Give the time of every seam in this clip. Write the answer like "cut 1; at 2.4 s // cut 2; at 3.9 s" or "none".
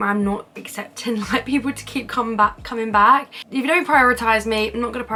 none